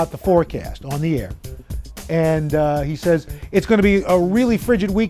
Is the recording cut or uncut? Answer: uncut